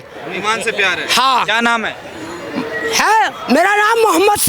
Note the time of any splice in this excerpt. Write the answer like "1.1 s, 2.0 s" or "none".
none